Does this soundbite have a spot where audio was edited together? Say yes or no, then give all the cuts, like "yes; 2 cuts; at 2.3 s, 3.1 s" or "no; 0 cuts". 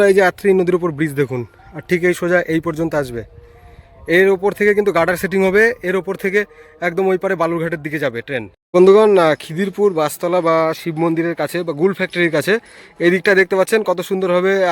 yes; 1 cut; at 8.6 s